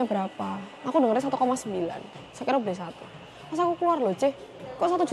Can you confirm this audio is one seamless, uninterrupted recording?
yes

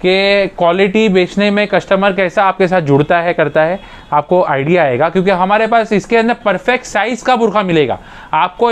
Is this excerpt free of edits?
yes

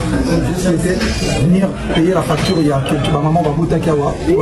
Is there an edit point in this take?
no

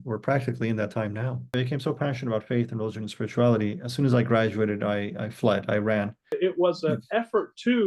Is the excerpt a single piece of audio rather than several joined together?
no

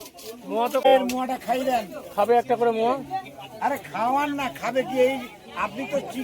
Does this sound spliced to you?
yes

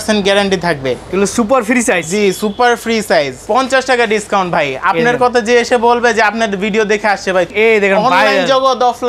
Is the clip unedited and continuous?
no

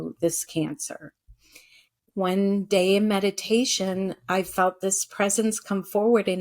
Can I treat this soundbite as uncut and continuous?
no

